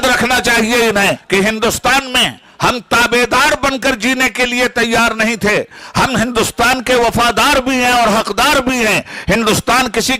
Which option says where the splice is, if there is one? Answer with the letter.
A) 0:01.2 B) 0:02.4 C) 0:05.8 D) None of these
A